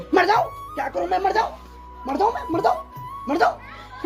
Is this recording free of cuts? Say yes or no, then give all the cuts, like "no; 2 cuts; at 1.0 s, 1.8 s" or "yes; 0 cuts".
yes; 0 cuts